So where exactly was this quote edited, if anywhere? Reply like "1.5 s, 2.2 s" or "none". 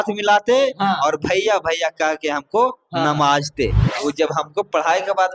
3.9 s